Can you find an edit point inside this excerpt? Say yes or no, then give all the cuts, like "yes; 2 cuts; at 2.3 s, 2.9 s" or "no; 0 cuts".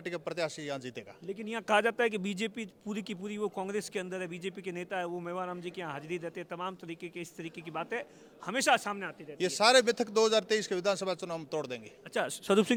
no; 0 cuts